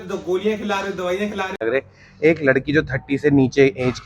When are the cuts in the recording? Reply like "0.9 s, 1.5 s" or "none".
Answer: 1.6 s